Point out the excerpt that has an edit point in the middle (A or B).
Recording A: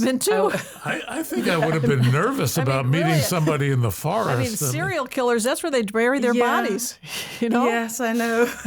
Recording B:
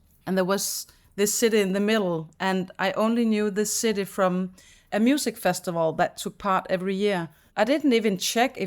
B